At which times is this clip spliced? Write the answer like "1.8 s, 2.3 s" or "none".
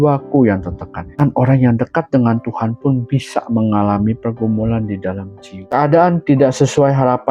1.1 s, 5.5 s